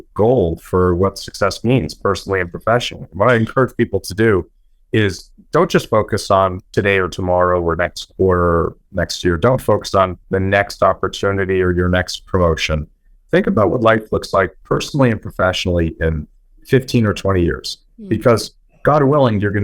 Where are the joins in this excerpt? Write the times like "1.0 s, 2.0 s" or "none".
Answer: 6.6 s, 10.2 s